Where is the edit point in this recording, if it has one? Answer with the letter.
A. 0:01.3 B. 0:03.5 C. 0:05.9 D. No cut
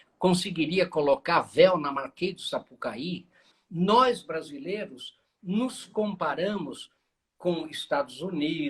B